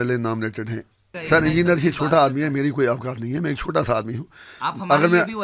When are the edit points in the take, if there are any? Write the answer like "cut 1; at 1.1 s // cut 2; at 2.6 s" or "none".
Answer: cut 1; at 1.1 s